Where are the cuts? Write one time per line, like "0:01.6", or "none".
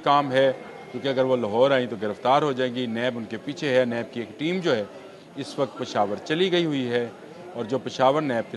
none